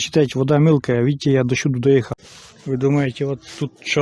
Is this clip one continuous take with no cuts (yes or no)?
no